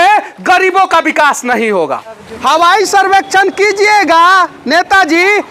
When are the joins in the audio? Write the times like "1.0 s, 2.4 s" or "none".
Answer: 2.3 s

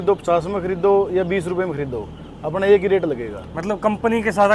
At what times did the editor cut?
none

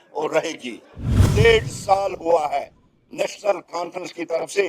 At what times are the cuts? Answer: 1.1 s

